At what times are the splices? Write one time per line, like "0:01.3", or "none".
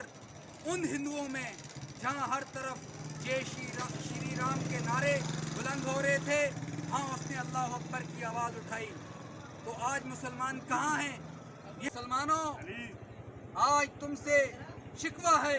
0:11.9